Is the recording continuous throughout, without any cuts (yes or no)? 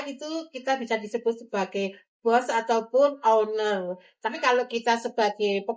no